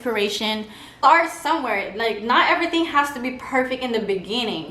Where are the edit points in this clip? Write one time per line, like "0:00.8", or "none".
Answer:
0:00.9